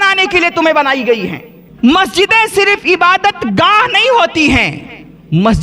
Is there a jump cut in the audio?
yes; 1 cut; at 1.7 s

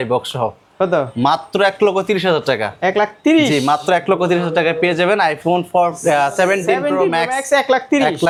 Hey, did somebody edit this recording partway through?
no; 0 cuts

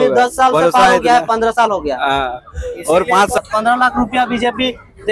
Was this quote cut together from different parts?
yes; 1 cut; at 3.4 s

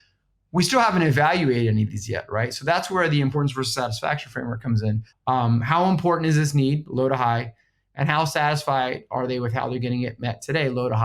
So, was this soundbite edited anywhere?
yes; 1 cut; at 5.1 s

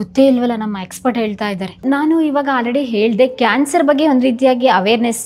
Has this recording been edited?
yes; 1 cut; at 1.8 s

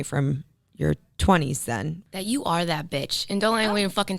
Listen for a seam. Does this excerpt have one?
yes; 1 cut; at 2.0 s

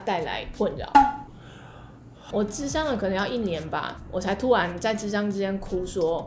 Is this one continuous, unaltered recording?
no; 2 cuts; at 2.2 s, 4.0 s

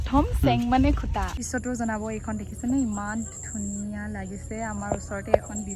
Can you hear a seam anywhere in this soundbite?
yes; 1 cut; at 1.4 s

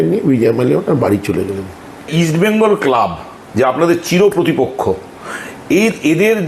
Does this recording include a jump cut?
yes; 1 cut; at 2.1 s

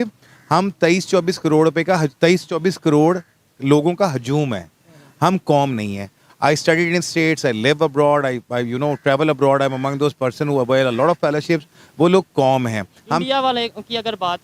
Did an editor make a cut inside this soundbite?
no; 0 cuts

